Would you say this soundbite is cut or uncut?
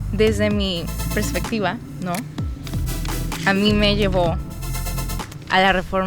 cut